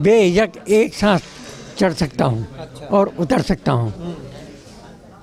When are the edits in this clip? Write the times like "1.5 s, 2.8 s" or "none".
none